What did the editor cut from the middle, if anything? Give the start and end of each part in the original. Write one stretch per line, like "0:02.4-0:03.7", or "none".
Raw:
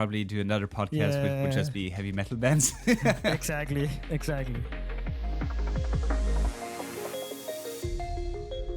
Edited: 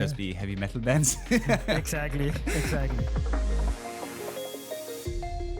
0:04.5-0:05.7